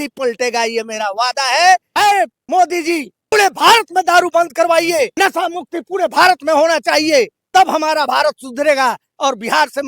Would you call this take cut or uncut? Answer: cut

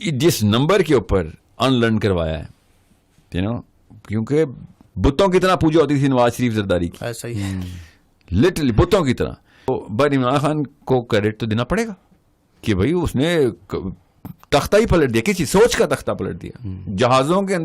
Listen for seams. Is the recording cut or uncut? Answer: cut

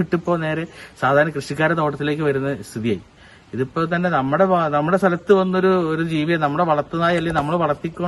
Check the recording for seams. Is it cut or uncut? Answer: uncut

